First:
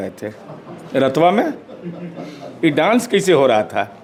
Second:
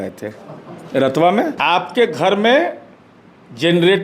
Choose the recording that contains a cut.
second; 1 cut; at 1.6 s

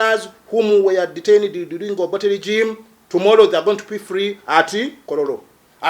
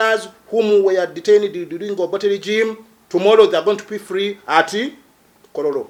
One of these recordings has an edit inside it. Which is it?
first; 1 cut; at 5.0 s

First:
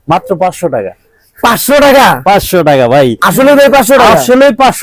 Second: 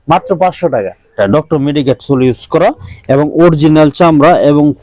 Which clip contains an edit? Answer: second; 1 cut; at 1.1 s

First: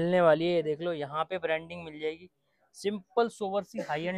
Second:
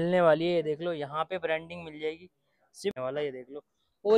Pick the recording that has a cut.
second; 1 cut; at 3.0 s

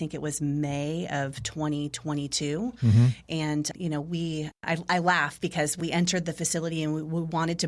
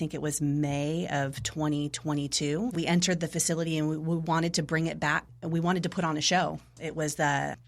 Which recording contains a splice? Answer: second; 2 cuts; at 2.7 s, 5.3 s

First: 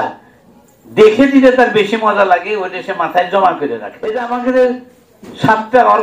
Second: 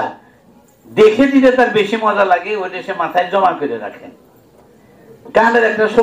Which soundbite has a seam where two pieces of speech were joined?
first; 1 cut; at 4.0 s

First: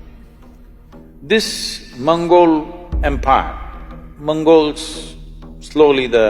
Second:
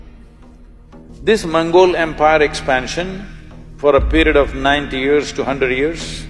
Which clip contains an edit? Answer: second; 1 cut; at 1.1 s

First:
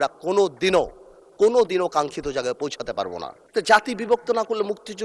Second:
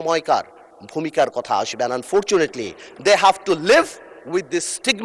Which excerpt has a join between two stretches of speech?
first; 1 cut; at 3.4 s

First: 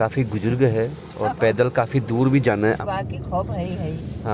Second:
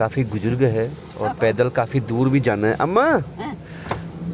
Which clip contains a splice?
first; 1 cut; at 2.8 s

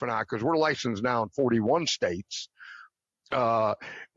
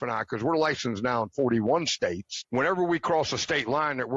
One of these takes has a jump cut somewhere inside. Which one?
second; 1 cut; at 2.3 s

